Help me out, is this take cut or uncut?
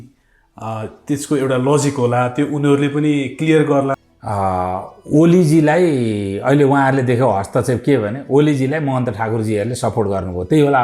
cut